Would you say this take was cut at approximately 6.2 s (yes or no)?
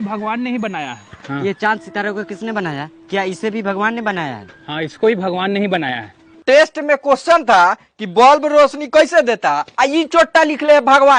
yes